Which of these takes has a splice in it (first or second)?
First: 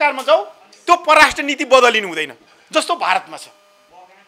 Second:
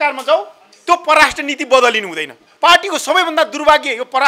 second